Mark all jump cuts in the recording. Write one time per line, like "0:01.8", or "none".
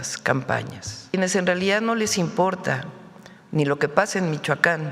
0:01.1